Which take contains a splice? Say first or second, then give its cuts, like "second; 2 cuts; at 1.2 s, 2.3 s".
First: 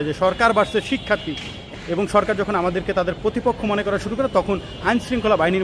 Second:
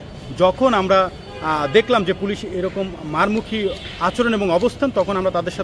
first; 1 cut; at 1.6 s